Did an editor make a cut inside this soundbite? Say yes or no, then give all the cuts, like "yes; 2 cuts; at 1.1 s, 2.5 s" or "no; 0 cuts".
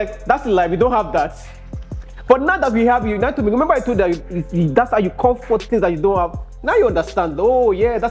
no; 0 cuts